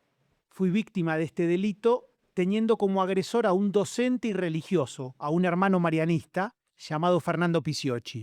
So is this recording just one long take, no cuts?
yes; 0 cuts

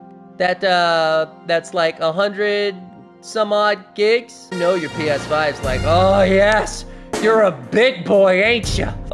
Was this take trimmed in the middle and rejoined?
no; 0 cuts

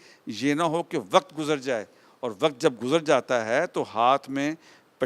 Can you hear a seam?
no; 0 cuts

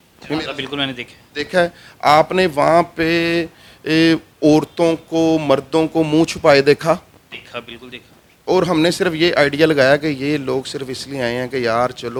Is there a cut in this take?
no; 0 cuts

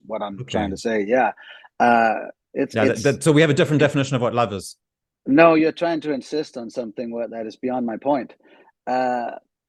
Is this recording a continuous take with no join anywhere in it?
yes; 0 cuts

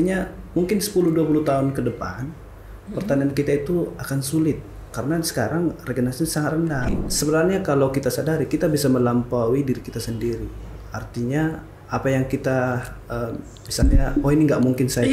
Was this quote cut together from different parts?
yes; 1 cut; at 6.9 s

